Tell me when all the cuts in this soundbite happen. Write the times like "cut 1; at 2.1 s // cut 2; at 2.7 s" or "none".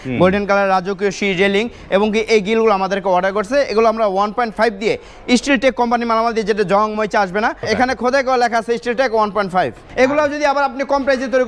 cut 1; at 7.6 s // cut 2; at 9.8 s